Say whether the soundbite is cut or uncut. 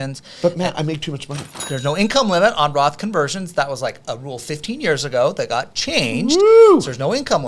cut